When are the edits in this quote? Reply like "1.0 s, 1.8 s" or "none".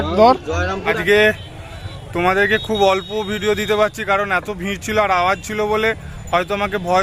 1.0 s